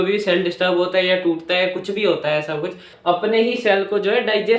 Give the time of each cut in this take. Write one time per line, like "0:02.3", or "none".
0:02.9